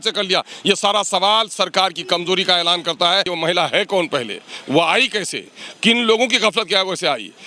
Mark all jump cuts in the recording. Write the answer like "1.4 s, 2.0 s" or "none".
3.3 s